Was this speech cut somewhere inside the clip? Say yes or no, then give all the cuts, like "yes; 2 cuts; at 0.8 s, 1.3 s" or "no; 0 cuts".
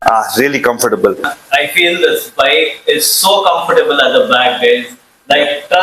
yes; 1 cut; at 1.3 s